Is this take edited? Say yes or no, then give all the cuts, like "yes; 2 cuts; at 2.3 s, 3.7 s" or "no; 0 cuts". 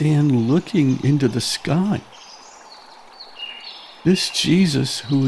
yes; 2 cuts; at 2.0 s, 4.0 s